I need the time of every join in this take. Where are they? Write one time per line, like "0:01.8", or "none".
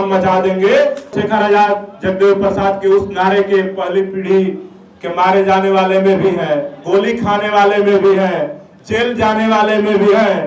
0:01.1

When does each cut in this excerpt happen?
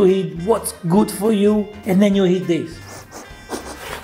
0:02.8

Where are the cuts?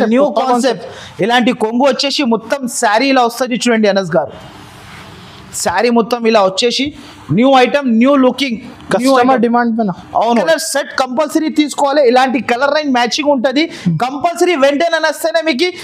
0:10.4

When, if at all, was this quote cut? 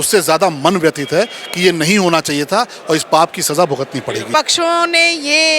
0:04.3

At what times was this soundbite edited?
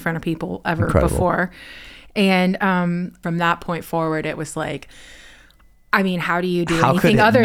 0:03.2

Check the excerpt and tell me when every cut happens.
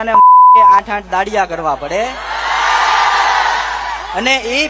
0:00.9

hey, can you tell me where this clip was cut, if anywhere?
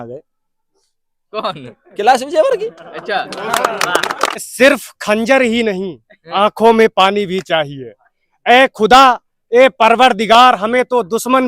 0:04.5

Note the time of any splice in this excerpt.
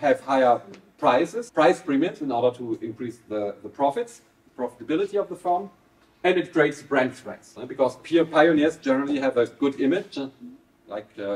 0:01.4
0:06.1

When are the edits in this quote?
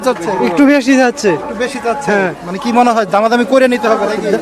none

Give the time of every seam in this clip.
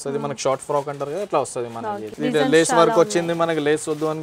0:02.1

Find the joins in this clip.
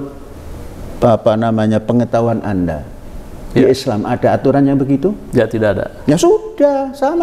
none

